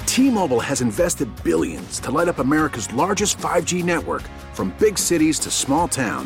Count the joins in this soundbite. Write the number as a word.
zero